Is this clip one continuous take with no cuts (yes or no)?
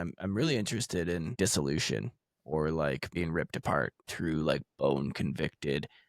no